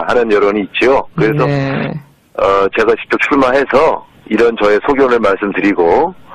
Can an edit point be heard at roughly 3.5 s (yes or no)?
yes